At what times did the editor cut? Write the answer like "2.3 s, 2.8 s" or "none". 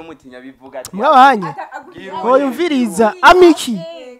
none